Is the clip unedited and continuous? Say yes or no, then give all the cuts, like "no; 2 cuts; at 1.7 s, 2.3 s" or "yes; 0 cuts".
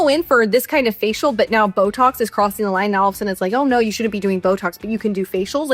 yes; 0 cuts